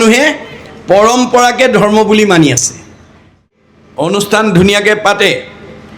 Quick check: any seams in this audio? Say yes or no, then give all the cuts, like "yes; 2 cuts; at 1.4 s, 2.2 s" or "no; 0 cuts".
yes; 1 cut; at 3.3 s